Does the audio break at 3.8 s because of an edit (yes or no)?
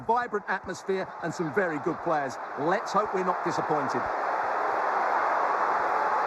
yes